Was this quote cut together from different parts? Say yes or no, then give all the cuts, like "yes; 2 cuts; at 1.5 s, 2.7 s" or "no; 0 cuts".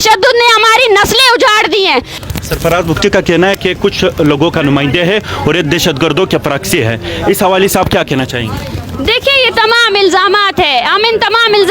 yes; 1 cut; at 2.2 s